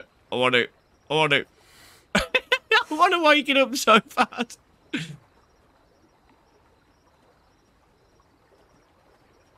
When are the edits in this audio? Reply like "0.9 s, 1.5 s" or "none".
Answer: none